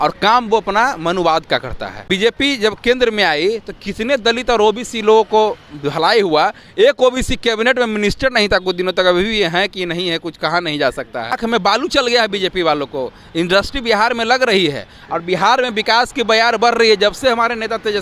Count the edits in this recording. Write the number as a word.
two